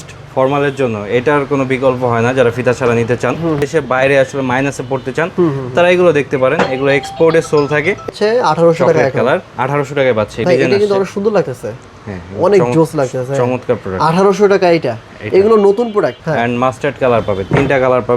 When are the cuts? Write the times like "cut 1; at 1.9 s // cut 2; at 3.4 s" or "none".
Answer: cut 1; at 3.6 s // cut 2; at 8.1 s // cut 3; at 10.4 s // cut 4; at 16.2 s

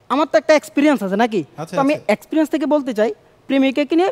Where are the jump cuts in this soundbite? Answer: none

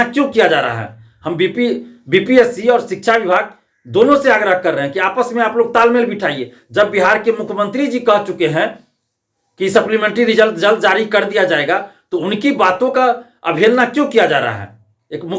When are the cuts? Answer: none

